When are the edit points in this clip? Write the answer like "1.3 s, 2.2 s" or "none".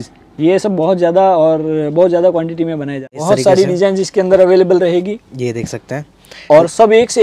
3.1 s